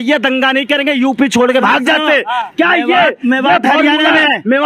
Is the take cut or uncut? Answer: uncut